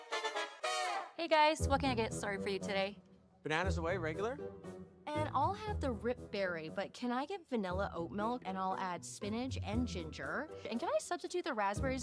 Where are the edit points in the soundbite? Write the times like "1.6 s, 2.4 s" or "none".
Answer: 1.0 s